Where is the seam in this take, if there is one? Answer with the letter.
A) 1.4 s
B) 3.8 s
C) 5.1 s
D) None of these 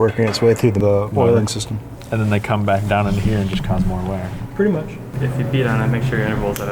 C